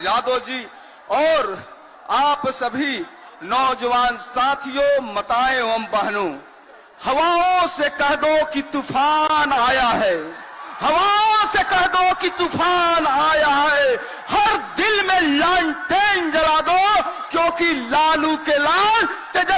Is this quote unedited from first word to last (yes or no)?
yes